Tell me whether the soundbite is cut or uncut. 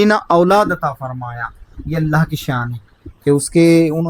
uncut